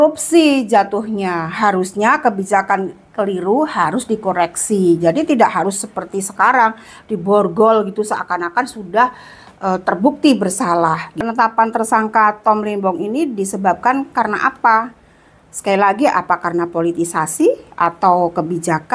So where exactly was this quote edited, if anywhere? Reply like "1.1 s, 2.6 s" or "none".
11.1 s